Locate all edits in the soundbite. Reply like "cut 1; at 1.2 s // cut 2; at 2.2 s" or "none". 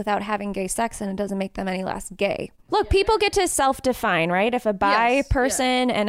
cut 1; at 2.6 s